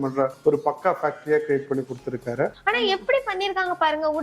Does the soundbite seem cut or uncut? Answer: cut